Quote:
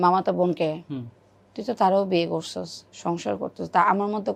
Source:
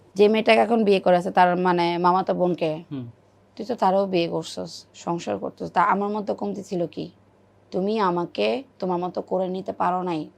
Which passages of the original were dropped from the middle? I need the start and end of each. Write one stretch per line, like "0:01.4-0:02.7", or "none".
none

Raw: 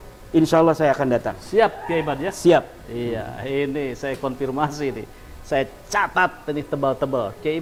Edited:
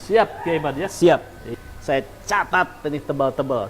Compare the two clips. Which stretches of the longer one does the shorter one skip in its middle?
0:02.9-0:05.1

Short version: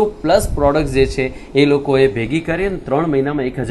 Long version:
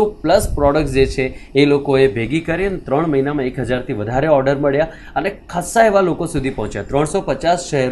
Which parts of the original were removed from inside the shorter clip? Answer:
none

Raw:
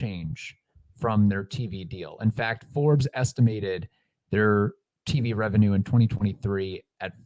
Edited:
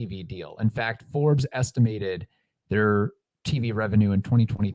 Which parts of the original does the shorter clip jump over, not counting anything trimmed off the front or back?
none

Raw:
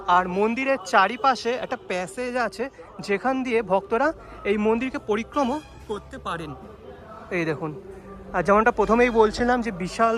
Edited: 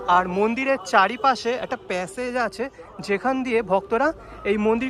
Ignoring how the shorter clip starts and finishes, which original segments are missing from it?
none

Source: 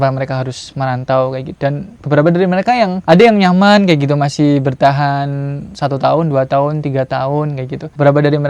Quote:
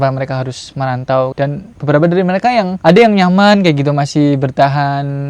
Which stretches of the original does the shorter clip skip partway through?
0:01.3-0:01.6

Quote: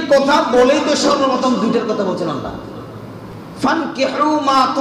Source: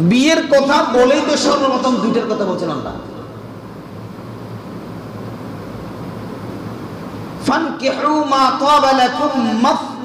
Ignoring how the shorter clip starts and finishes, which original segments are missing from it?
0:03.8-0:07.2

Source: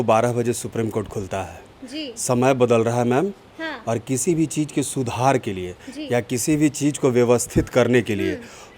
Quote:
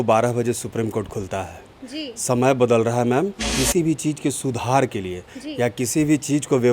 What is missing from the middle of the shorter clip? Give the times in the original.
0:03.5-0:04.0

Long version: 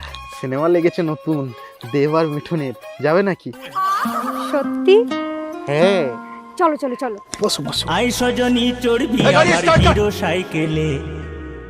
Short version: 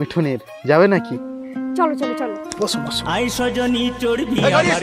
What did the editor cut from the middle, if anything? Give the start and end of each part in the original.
0:03.7-0:06.1

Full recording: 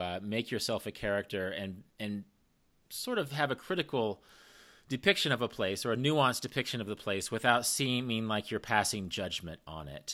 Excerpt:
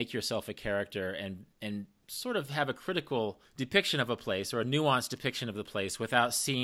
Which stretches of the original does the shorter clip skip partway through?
0:02.4-0:02.8
0:04.3-0:04.8

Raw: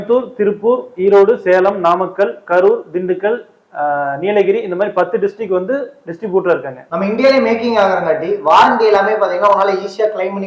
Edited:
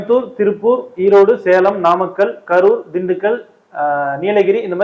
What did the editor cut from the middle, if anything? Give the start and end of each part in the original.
none

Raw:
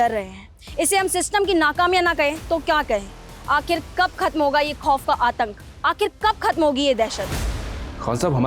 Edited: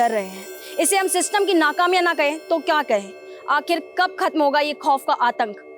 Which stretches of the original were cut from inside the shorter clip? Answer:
none

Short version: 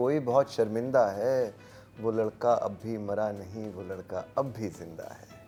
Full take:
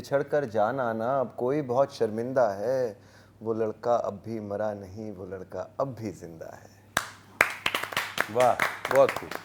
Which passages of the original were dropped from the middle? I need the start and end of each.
none

